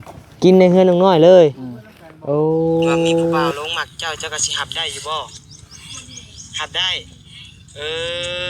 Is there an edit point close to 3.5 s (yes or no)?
yes